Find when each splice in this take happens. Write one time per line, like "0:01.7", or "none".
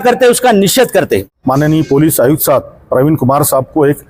0:01.3